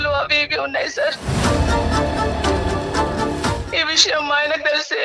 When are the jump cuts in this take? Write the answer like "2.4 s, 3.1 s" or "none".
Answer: 3.6 s